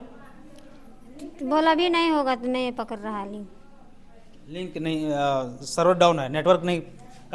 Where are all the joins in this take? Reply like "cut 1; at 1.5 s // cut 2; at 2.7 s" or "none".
none